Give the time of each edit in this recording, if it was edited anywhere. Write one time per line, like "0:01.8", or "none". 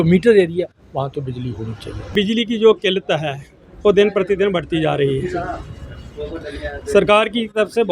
0:02.1